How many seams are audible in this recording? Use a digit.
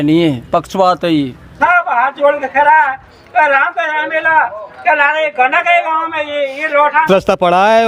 2